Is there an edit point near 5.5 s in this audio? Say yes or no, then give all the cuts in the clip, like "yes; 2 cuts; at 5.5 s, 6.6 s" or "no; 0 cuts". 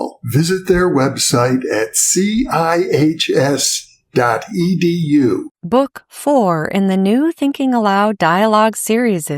yes; 1 cut; at 5.5 s